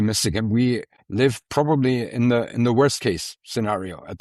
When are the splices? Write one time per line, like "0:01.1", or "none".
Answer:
0:01.0